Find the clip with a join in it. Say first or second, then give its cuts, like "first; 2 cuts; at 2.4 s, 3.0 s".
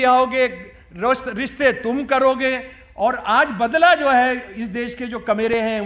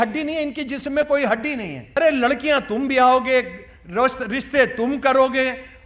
second; 1 cut; at 2.0 s